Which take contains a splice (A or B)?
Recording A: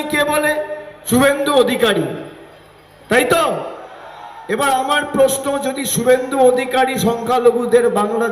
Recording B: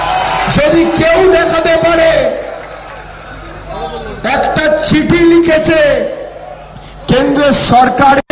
A